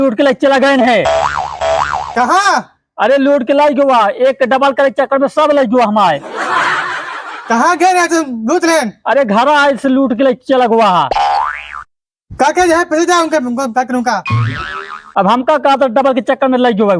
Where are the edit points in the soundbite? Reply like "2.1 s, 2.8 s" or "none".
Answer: none